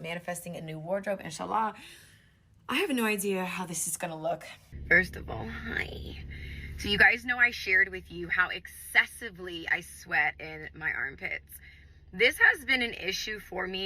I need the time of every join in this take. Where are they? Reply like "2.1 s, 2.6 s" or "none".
4.7 s